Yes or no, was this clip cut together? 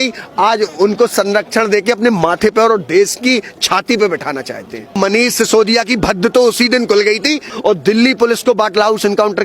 yes